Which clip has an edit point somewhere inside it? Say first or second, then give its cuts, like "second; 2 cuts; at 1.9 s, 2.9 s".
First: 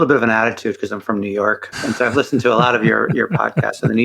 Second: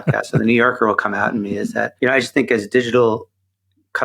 second; 1 cut; at 1.9 s